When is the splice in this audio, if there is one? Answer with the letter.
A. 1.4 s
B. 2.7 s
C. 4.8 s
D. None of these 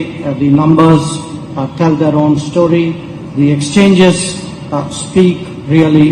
D